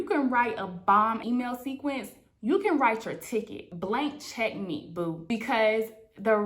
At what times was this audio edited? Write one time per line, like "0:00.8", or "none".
0:01.2
0:03.6